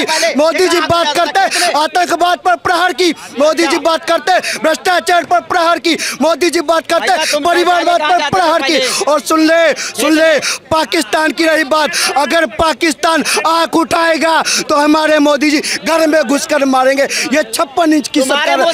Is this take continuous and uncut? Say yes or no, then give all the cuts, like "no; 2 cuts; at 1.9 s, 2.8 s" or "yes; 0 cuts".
yes; 0 cuts